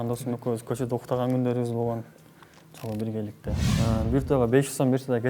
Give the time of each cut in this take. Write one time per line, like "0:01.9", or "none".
0:03.6